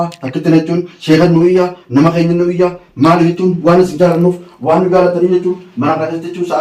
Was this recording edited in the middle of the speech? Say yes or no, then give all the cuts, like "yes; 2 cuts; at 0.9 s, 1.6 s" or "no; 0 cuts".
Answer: no; 0 cuts